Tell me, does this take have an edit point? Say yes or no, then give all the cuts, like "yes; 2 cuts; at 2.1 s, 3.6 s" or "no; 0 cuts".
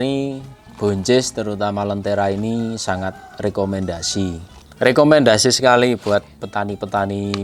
yes; 1 cut; at 4.5 s